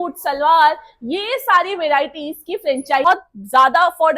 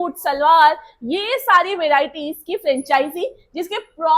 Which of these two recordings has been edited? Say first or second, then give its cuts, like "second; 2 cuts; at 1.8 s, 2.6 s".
first; 1 cut; at 3.1 s